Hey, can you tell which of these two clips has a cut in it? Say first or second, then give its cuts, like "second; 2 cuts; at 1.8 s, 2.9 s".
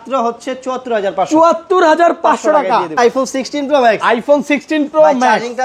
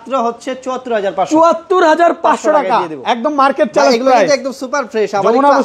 first; 1 cut; at 3.0 s